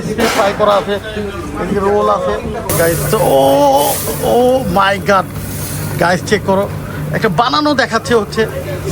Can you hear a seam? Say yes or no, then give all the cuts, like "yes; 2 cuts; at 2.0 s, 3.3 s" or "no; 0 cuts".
yes; 2 cuts; at 2.7 s, 4.4 s